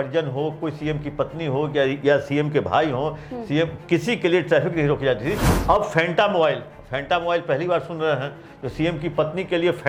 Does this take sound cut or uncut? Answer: uncut